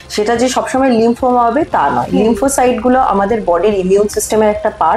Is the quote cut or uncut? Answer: uncut